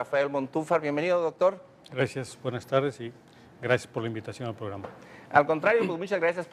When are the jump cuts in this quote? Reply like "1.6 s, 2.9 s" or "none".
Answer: 5.5 s